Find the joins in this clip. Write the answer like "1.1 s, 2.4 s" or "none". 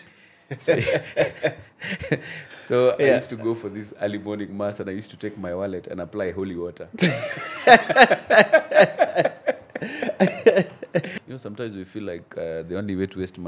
11.2 s